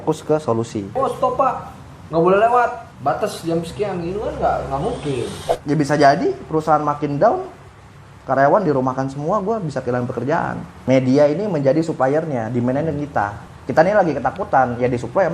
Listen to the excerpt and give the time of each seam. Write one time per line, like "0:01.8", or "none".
0:01.0
0:05.4
0:10.7